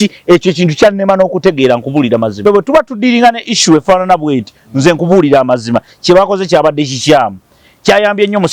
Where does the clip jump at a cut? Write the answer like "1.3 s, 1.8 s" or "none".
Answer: 2.3 s